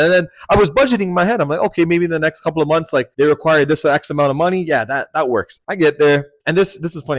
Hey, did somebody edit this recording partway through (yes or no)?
no